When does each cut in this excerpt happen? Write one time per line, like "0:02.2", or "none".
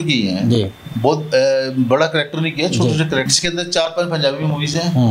0:03.3